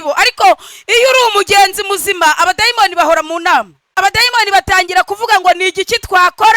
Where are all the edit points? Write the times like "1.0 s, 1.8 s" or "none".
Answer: 3.8 s